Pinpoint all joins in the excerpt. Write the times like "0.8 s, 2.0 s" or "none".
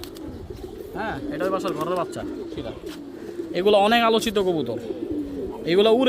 2.5 s